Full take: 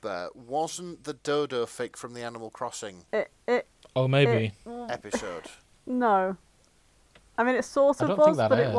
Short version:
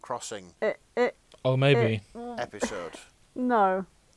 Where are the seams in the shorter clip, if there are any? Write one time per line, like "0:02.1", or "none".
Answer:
none